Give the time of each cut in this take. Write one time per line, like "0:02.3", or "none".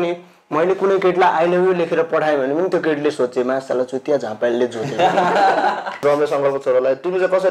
0:06.0